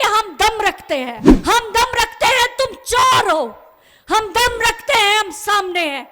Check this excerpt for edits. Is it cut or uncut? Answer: cut